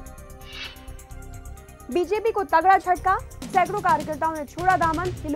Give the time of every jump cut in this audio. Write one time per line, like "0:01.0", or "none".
0:01.1